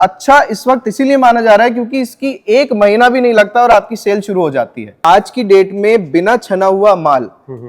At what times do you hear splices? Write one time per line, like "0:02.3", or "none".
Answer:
0:05.0